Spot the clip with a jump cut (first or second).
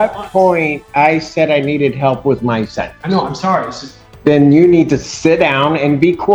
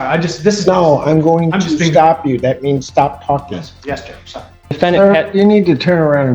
second